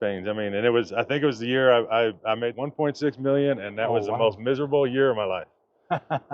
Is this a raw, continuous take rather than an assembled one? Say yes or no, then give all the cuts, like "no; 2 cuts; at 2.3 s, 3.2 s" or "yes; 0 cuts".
no; 1 cut; at 2.6 s